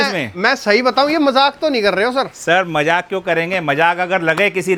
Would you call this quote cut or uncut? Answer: uncut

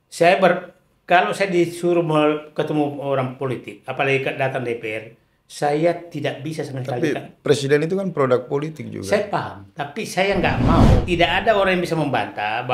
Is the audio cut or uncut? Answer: cut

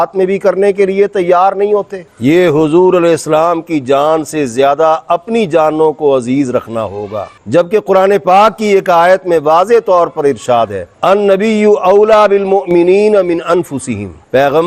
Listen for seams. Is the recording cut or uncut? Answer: uncut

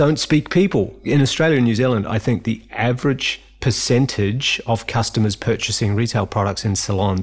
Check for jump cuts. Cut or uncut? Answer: cut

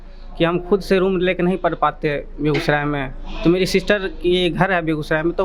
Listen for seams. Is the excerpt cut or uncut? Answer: uncut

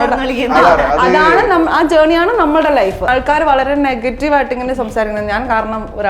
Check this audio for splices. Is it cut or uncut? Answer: cut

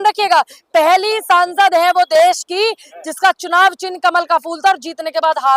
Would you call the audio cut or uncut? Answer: uncut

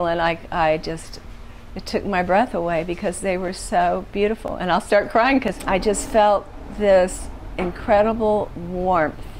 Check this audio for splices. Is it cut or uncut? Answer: cut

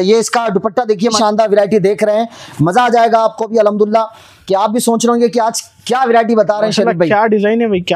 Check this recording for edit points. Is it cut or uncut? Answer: cut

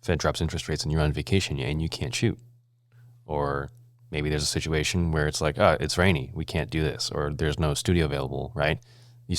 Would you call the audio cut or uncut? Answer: uncut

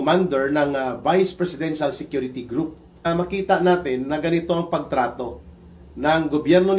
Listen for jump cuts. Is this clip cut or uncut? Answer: cut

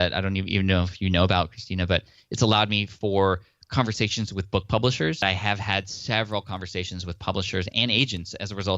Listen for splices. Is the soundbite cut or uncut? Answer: cut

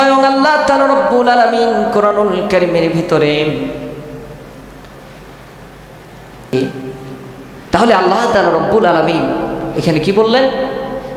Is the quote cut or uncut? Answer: cut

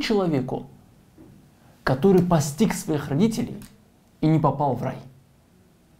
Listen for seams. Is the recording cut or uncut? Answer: uncut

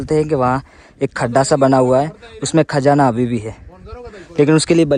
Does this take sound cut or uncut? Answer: uncut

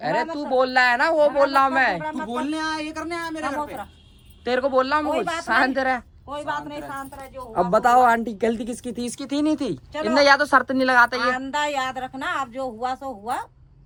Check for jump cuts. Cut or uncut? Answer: uncut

